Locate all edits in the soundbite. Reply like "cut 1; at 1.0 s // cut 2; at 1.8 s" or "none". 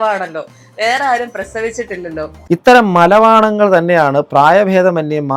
cut 1; at 2.3 s